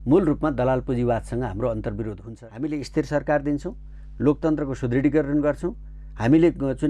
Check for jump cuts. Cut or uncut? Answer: cut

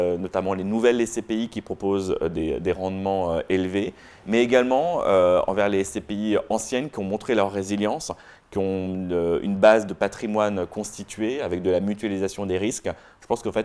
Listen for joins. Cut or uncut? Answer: uncut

